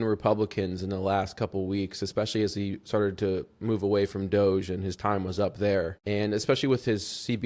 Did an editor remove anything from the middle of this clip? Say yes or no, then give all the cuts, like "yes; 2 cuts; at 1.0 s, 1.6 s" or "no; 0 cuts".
yes; 1 cut; at 6.0 s